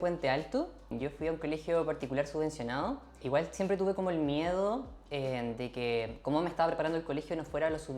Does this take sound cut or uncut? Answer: cut